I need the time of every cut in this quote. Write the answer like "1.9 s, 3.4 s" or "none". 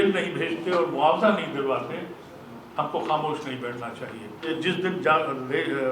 4.5 s

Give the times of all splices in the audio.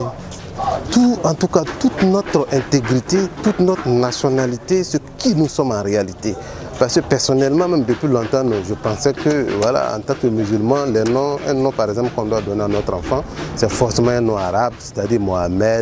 none

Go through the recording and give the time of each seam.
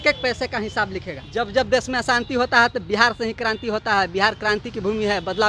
1.1 s

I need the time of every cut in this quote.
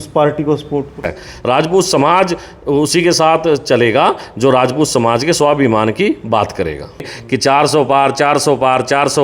1.2 s, 7.2 s

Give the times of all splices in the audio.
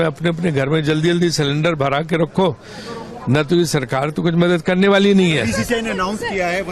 none

